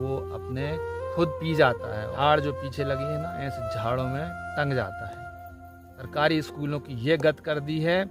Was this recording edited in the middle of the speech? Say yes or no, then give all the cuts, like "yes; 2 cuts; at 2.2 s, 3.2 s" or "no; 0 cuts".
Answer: yes; 2 cuts; at 2.1 s, 6.0 s